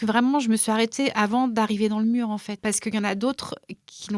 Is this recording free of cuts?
no; 1 cut; at 2.6 s

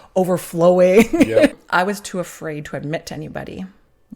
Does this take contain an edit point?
yes; 1 cut; at 1.5 s

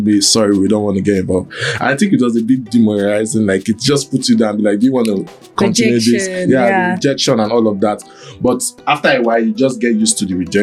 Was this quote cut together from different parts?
no; 0 cuts

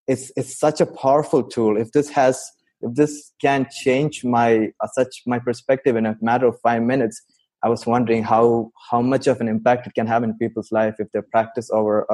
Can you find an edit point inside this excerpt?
no; 0 cuts

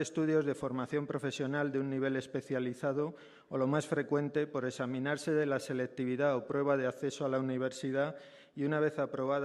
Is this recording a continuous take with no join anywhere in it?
no; 1 cut; at 4.5 s

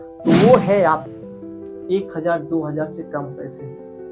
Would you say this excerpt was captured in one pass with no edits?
no; 1 cut; at 1.1 s

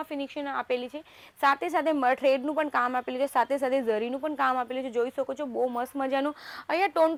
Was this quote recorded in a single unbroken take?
yes; 0 cuts

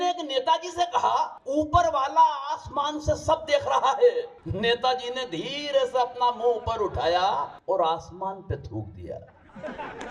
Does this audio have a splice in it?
yes; 3 cuts; at 1.4 s, 4.4 s, 7.5 s

